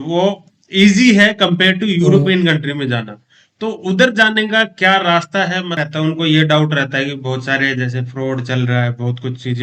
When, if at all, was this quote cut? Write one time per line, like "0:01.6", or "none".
0:05.8

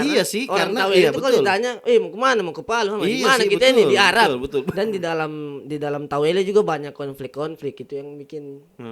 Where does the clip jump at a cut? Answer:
0:04.7

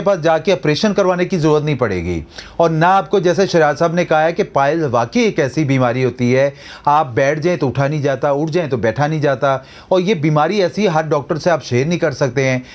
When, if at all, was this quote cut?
none

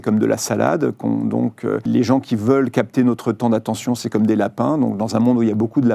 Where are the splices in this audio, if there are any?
0:01.8

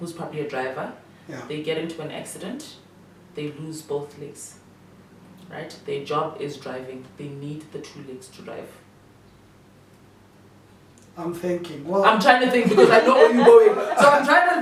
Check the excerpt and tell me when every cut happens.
none

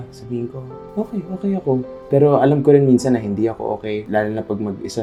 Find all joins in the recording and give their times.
none

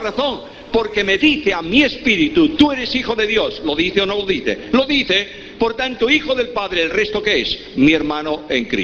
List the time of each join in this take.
none

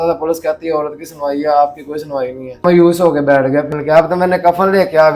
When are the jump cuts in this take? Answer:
0:02.6
0:03.7

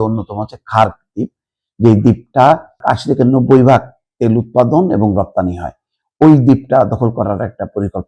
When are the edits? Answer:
0:02.8

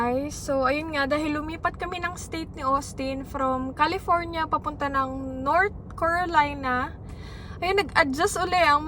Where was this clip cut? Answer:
none

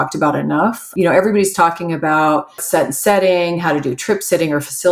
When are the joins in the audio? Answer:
0:00.9
0:02.6

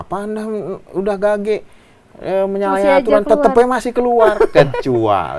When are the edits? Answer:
none

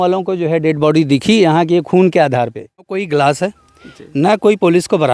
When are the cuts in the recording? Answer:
0:03.0

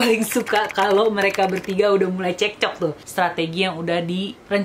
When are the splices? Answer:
0:03.0

